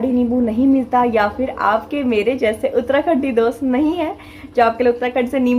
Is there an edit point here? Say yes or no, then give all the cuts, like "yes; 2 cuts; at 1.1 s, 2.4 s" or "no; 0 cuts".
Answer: no; 0 cuts